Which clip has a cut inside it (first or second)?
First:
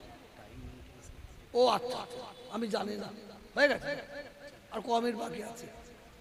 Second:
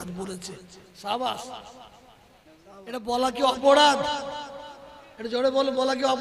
second